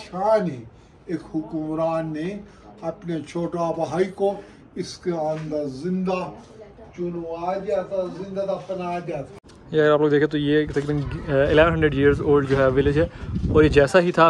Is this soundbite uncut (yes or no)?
no